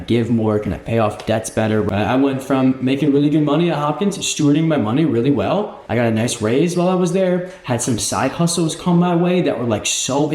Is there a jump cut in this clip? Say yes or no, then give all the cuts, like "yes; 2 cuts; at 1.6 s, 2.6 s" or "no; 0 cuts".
yes; 2 cuts; at 1.9 s, 5.8 s